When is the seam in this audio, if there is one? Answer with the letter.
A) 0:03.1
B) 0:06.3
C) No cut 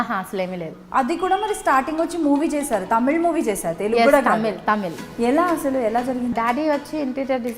B